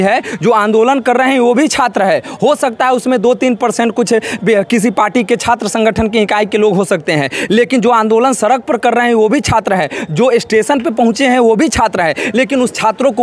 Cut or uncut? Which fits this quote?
uncut